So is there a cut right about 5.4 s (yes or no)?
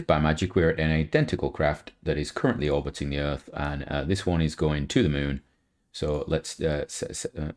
no